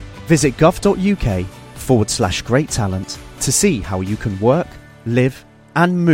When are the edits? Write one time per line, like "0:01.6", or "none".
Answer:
none

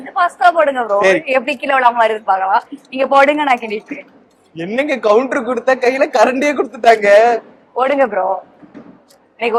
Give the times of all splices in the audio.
none

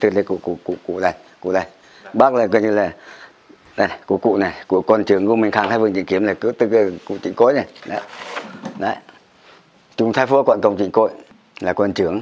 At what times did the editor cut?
0:11.2

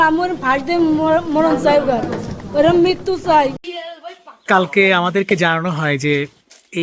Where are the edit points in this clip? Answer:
0:03.7

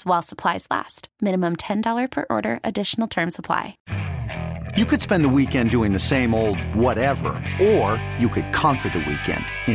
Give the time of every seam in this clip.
0:03.8

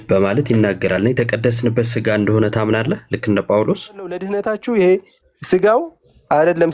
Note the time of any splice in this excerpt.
0:04.2

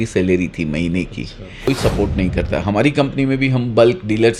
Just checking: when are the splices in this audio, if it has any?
0:01.7

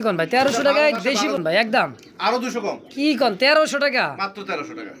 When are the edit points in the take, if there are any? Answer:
0:01.4

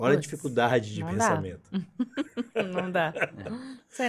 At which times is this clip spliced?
none

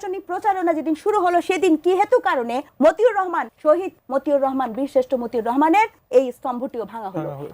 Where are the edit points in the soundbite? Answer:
0:02.6
0:03.7
0:06.0

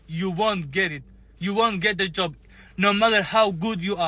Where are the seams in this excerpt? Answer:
none

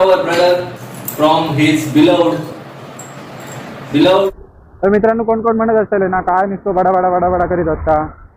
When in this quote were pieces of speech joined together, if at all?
0:04.3

